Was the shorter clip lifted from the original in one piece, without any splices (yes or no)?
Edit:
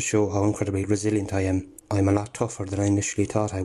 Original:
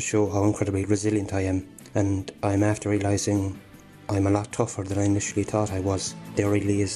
no